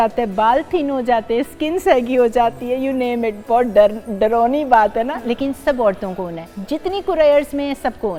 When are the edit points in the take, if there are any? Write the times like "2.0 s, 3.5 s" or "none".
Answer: none